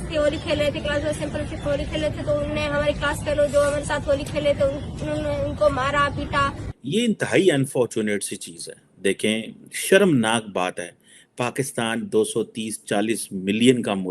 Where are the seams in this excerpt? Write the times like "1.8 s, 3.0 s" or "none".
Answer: 6.8 s